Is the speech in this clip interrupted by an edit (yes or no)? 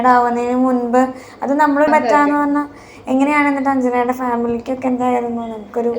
yes